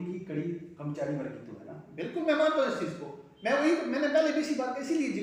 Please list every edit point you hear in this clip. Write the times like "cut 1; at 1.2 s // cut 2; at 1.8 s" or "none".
none

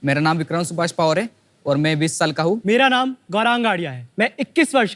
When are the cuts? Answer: cut 1; at 2.6 s // cut 2; at 4.0 s

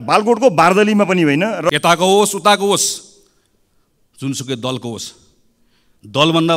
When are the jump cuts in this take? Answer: cut 1; at 1.7 s

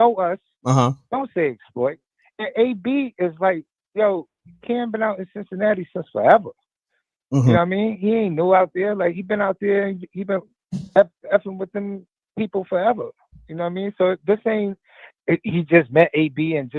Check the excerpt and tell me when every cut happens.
none

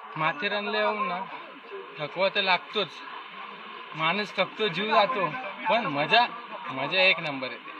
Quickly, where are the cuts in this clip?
none

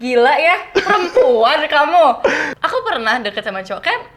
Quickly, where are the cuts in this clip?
cut 1; at 2.5 s

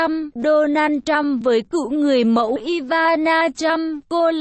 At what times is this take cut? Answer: none

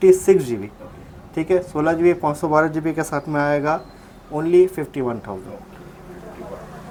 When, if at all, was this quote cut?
none

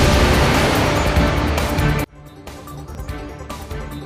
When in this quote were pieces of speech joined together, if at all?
cut 1; at 2.9 s

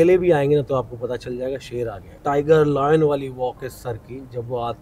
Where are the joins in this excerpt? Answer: cut 1; at 2.1 s

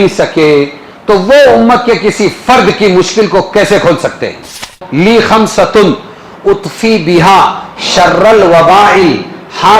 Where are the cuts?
cut 1; at 4.8 s

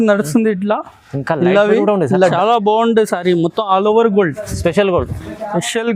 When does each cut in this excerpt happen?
cut 1; at 2.3 s

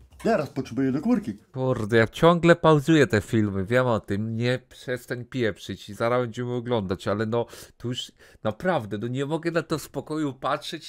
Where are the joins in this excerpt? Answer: cut 1; at 1.4 s

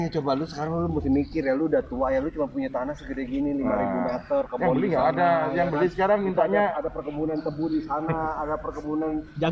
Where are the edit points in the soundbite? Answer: none

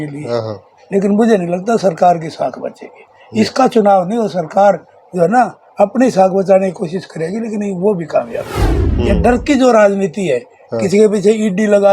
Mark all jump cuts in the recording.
cut 1; at 8.8 s

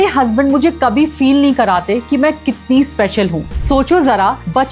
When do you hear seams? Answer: cut 1; at 3.5 s

